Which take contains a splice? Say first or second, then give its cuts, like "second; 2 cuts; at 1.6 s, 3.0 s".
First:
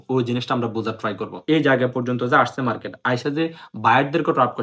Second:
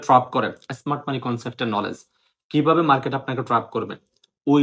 first; 1 cut; at 1.3 s